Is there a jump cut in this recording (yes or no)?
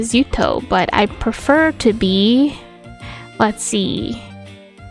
no